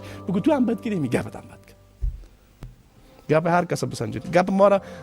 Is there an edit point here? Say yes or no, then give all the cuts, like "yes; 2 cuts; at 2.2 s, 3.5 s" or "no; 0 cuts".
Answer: yes; 1 cut; at 2.5 s